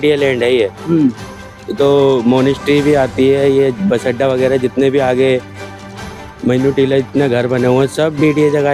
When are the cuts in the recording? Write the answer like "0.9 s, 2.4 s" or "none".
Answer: none